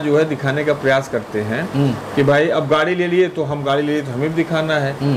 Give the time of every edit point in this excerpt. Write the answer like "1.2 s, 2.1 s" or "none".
none